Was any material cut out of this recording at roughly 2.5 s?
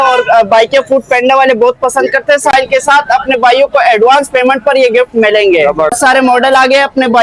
yes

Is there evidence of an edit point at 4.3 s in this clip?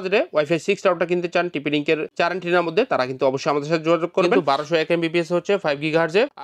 yes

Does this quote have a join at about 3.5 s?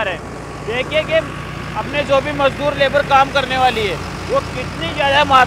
no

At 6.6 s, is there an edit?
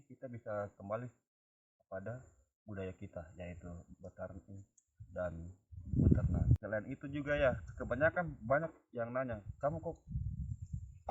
yes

